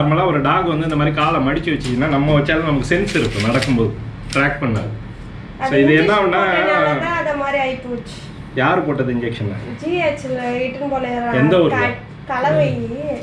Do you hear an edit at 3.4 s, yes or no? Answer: no